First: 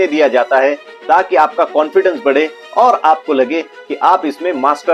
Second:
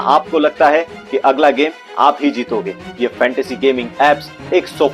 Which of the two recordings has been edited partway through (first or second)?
second